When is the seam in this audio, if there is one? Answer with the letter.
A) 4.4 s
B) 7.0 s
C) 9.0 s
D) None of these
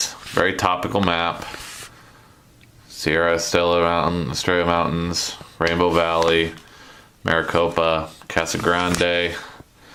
D